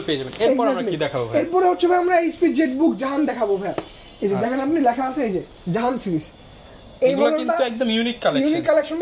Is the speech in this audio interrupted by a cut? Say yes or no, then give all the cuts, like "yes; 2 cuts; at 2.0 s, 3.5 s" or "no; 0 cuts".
no; 0 cuts